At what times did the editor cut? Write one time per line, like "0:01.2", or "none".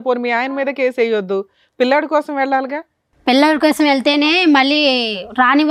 none